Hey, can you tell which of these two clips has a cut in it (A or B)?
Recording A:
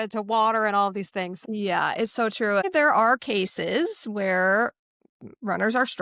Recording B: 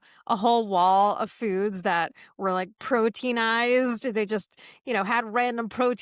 A